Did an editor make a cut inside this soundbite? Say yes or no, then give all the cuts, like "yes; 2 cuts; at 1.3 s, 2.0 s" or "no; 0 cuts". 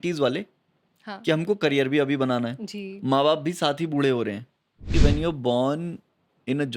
yes; 1 cut; at 4.9 s